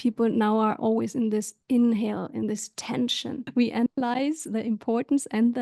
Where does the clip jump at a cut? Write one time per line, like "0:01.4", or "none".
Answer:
0:03.4